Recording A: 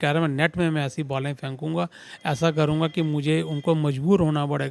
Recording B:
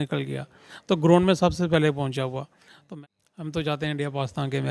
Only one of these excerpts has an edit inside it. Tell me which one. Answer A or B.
B